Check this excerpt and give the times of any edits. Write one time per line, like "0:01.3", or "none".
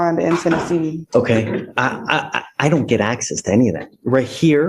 0:01.0